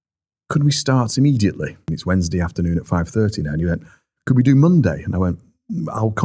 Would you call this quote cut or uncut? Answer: cut